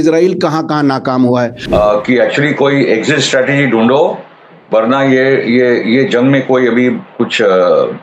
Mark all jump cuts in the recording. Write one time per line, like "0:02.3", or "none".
0:01.6